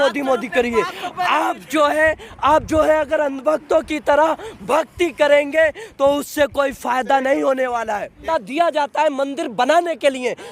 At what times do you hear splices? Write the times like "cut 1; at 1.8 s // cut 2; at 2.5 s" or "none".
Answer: cut 1; at 8.2 s